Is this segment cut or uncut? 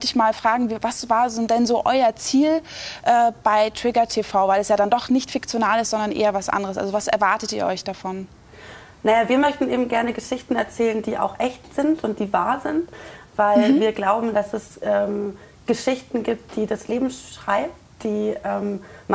cut